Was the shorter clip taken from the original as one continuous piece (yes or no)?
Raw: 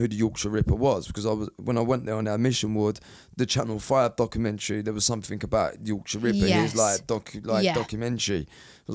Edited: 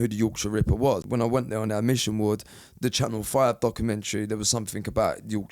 no